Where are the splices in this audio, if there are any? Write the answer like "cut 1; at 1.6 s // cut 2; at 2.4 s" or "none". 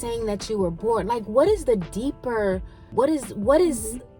cut 1; at 2.9 s